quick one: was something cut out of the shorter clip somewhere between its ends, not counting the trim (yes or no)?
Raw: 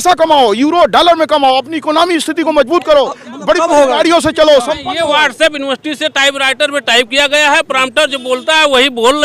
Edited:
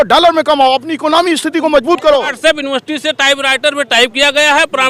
yes